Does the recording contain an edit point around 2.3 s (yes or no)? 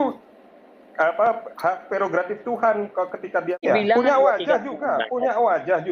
no